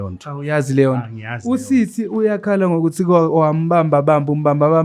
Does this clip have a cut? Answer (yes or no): no